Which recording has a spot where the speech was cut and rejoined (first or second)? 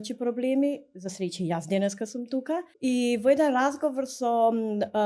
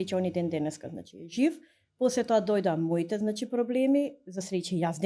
first